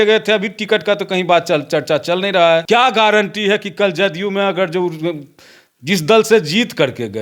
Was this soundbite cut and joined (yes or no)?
yes